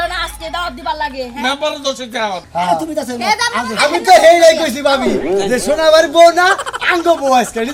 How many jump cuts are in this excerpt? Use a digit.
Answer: 1